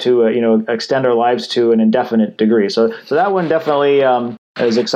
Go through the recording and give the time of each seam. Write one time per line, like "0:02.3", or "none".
none